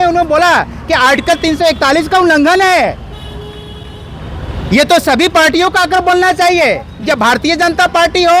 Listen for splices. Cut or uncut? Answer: uncut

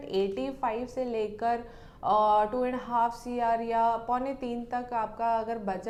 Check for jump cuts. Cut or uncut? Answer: uncut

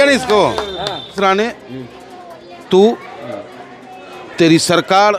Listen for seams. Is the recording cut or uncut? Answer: cut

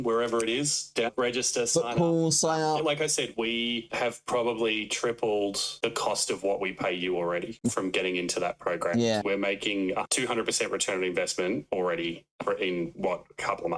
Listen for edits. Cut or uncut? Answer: cut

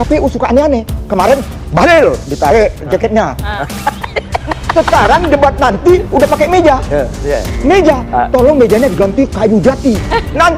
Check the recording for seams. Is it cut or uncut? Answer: uncut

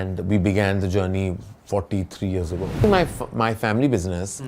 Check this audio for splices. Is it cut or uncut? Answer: cut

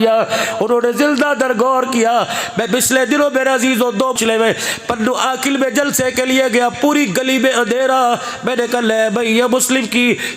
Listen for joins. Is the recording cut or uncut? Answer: cut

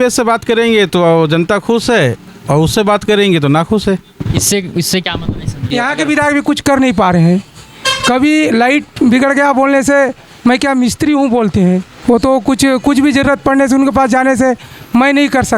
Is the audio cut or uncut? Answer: cut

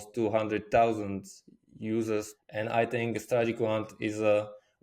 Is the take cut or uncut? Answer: cut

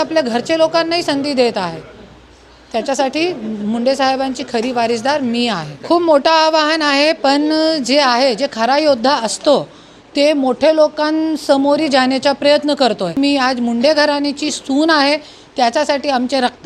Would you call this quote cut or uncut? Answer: cut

